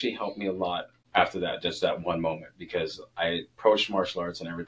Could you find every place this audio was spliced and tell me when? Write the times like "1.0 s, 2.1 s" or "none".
0.9 s